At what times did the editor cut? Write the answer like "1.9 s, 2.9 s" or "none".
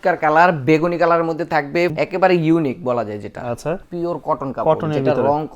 1.9 s, 3.8 s